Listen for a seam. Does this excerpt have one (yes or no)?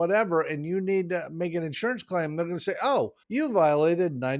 yes